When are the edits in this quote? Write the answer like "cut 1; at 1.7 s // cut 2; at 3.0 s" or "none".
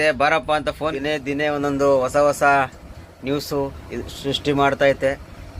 cut 1; at 1.0 s